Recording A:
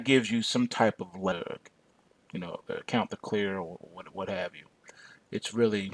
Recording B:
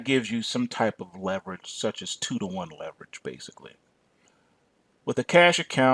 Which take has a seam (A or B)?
B